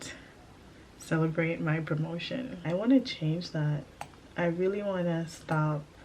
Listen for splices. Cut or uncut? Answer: cut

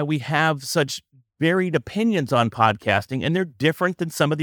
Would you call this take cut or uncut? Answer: uncut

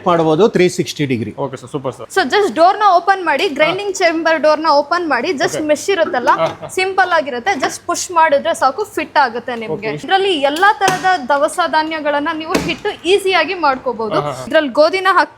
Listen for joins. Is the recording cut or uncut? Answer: cut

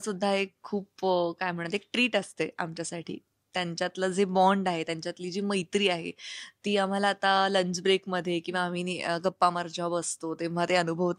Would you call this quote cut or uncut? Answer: uncut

